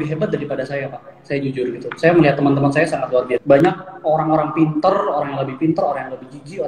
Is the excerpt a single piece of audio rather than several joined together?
no; 1 cut; at 3.6 s

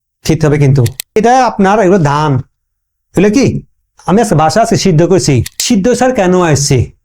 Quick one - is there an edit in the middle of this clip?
yes; 2 cuts; at 0.9 s, 5.5 s

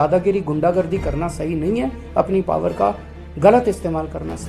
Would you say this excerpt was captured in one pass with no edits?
yes; 0 cuts

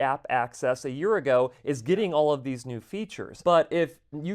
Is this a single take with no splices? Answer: no; 1 cut; at 3.3 s

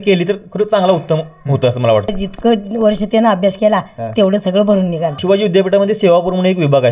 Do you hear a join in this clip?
yes; 2 cuts; at 2.1 s, 5.2 s

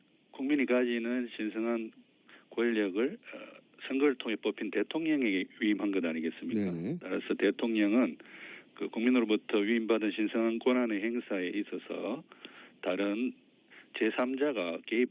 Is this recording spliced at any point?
yes; 1 cut; at 1.8 s

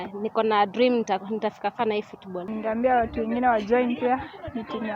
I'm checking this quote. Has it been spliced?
yes; 1 cut; at 2.5 s

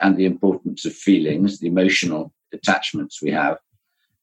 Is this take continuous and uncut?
no; 1 cut; at 2.4 s

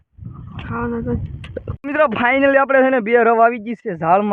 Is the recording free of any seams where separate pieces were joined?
no; 1 cut; at 1.7 s

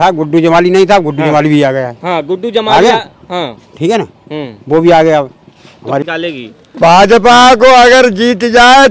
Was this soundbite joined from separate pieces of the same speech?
yes; 1 cut; at 6.1 s

